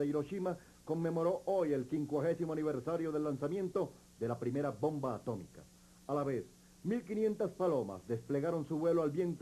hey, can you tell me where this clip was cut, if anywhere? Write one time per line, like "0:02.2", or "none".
none